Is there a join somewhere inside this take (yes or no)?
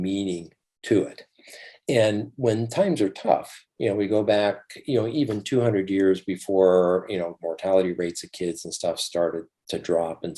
no